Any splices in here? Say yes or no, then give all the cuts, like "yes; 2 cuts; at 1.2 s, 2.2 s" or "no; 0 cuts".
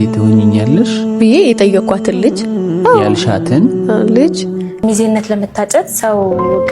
yes; 1 cut; at 4.8 s